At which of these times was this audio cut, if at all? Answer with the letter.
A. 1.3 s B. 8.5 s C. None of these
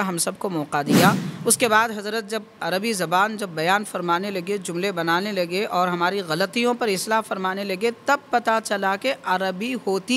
A